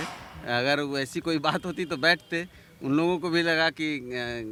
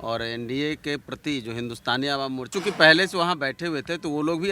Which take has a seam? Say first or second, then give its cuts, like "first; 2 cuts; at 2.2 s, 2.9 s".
second; 1 cut; at 2.5 s